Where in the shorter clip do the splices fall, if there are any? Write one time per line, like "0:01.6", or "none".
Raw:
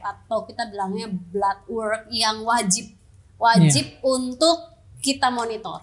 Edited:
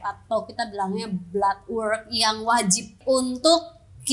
0:02.9